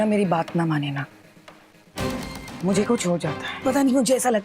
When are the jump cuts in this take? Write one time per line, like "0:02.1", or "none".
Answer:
0:03.4